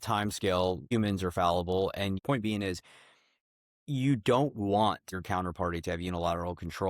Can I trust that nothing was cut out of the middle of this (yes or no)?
no